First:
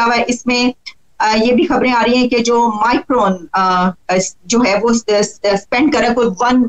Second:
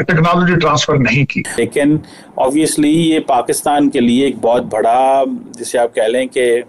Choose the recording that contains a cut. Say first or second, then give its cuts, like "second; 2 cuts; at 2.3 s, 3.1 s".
second; 1 cut; at 1.6 s